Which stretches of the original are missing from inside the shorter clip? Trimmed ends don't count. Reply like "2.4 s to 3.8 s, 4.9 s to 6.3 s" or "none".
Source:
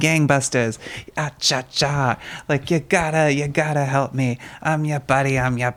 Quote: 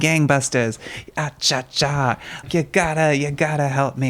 2.4 s to 2.6 s